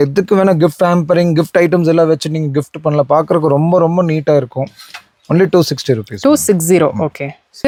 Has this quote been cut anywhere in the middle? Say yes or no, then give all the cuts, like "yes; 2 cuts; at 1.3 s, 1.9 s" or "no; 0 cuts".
no; 0 cuts